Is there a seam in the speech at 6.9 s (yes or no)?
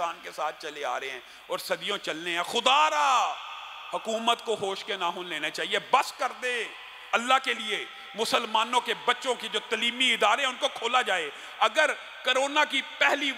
no